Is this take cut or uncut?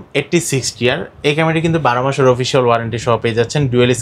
uncut